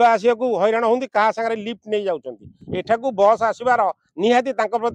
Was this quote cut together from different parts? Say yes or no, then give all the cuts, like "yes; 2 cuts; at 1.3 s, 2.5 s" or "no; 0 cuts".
no; 0 cuts